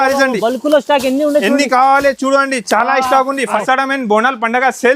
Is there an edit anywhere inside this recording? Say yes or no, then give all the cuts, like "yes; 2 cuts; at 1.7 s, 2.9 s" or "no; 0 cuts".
yes; 1 cut; at 3.6 s